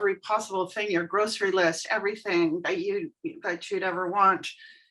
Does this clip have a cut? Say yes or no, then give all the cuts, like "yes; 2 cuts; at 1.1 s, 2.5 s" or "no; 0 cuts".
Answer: no; 0 cuts